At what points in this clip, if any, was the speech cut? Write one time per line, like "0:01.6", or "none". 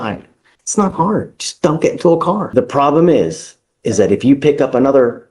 0:02.5